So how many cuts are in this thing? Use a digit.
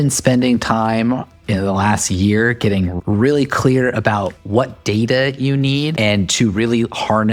2